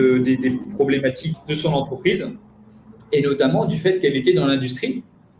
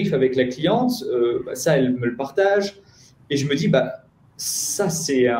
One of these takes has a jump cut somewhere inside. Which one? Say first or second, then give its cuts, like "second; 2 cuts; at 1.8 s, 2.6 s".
first; 1 cut; at 1.3 s